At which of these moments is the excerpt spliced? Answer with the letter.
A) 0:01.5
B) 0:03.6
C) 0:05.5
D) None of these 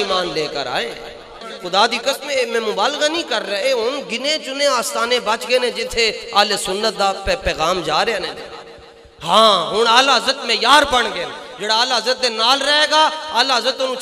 A